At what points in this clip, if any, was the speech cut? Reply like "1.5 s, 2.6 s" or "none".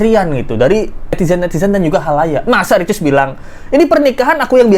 none